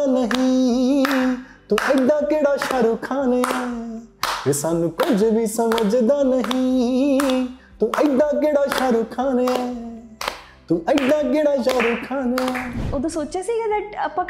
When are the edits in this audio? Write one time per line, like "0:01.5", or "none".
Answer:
0:12.8